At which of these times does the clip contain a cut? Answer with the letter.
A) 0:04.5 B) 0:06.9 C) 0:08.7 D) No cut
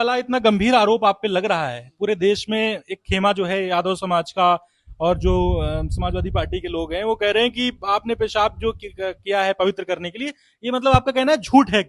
D